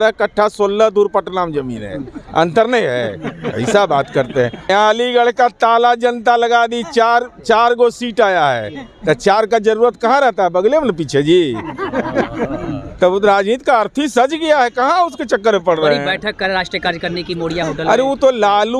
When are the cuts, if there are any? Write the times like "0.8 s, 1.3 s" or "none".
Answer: 4.7 s